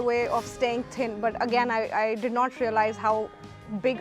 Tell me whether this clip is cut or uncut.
uncut